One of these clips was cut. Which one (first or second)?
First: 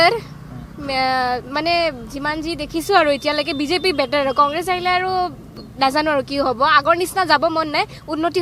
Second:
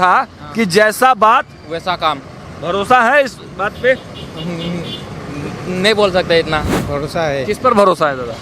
second